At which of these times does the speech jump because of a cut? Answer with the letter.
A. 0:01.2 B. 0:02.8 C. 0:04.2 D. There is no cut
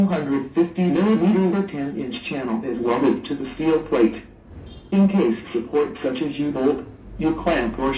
C